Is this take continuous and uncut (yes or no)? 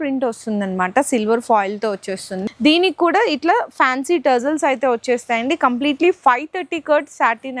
no